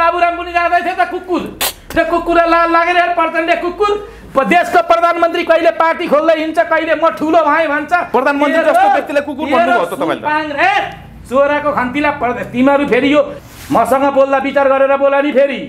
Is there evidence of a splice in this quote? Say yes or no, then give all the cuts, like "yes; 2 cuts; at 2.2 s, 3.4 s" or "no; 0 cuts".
no; 0 cuts